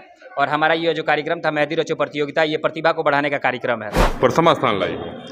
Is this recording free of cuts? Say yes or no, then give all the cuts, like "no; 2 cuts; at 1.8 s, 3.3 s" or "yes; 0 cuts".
no; 1 cut; at 4.0 s